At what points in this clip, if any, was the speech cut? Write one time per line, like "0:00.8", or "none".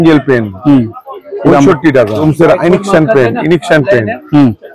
0:02.2